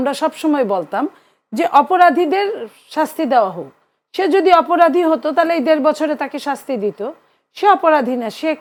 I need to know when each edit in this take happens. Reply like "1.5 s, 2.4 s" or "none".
none

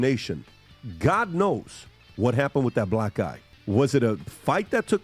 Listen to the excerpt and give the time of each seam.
3.5 s

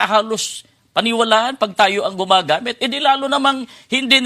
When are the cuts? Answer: none

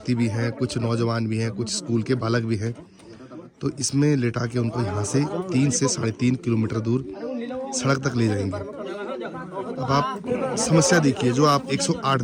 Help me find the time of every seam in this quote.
none

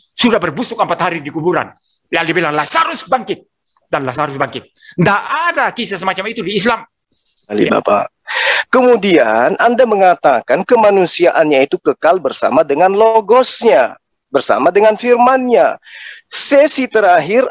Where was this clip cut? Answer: 7.5 s

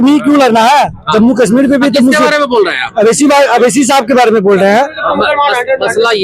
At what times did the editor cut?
none

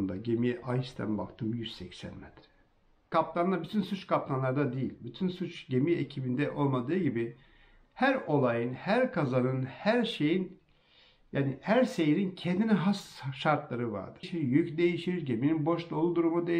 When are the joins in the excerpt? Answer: 3.1 s, 14.3 s

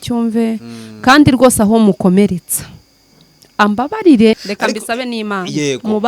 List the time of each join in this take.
4.5 s

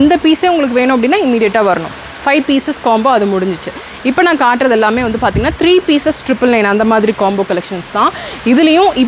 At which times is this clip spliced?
none

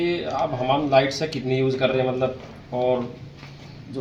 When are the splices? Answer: none

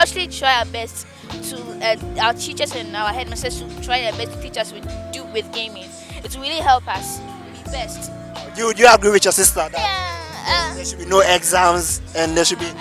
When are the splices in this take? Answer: none

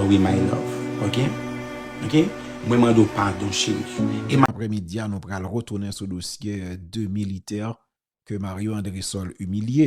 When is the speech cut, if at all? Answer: 4.5 s

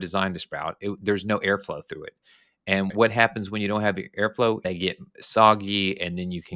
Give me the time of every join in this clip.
4.6 s

